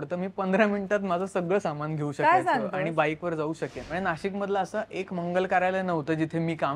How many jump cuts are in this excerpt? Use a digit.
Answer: 1